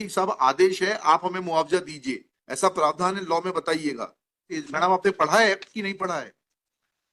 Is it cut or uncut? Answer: cut